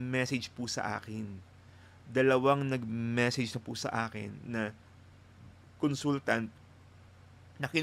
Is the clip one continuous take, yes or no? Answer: yes